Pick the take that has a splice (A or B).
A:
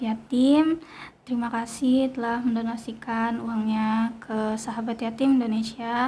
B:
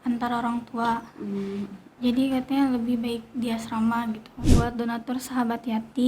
B